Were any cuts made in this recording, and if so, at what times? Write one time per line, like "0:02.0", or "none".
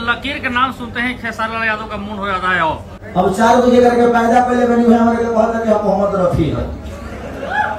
0:02.9